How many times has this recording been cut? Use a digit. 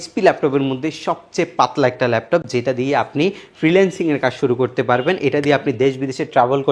0